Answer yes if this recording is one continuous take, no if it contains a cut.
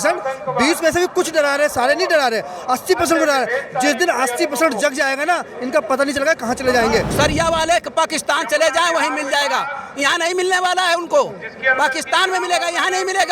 no